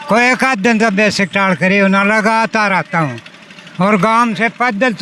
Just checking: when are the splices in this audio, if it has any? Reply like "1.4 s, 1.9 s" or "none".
none